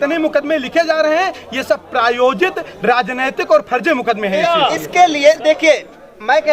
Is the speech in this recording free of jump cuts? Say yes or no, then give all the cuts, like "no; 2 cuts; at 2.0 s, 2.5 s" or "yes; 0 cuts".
no; 1 cut; at 4.5 s